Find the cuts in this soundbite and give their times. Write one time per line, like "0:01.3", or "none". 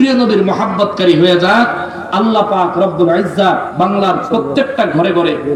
none